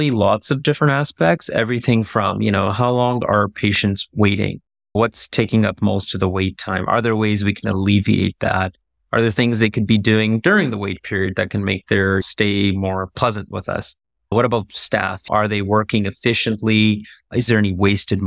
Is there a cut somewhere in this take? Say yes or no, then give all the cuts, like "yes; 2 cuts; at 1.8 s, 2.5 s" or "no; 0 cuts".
no; 0 cuts